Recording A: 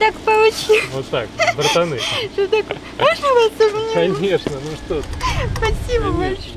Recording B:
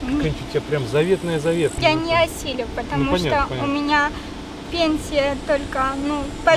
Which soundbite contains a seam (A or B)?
B